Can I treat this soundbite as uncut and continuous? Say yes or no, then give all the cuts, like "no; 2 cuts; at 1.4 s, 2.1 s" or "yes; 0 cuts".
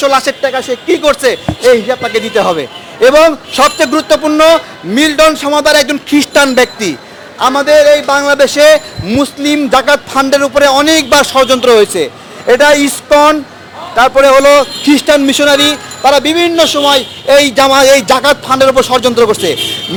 yes; 0 cuts